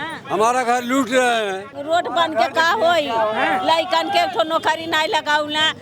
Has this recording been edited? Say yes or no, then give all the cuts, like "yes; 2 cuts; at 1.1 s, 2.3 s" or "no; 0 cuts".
yes; 1 cut; at 1.7 s